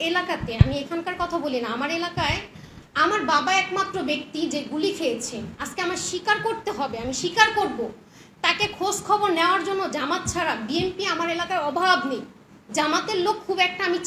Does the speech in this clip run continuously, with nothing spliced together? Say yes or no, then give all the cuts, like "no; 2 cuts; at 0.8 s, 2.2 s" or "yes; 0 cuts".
yes; 0 cuts